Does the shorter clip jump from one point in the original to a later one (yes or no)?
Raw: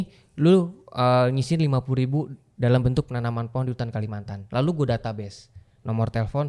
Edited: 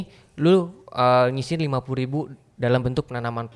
no